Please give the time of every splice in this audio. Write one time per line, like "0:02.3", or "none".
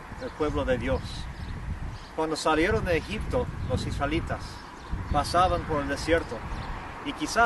none